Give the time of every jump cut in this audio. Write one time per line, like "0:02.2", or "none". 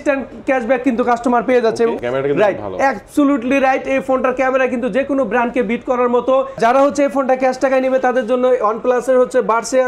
0:02.0
0:06.6